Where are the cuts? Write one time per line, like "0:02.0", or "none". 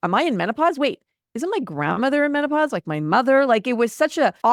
none